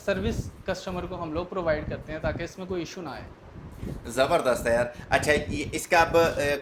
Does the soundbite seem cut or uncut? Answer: uncut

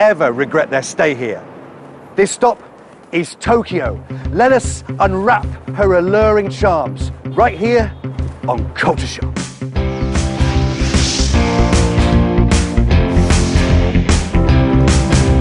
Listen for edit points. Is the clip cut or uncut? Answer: uncut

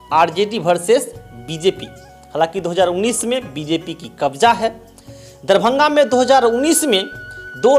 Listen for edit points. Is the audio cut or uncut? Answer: uncut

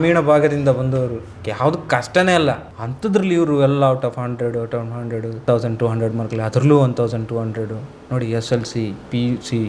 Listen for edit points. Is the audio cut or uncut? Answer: uncut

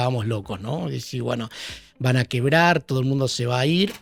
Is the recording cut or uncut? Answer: uncut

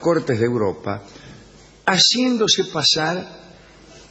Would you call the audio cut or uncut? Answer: cut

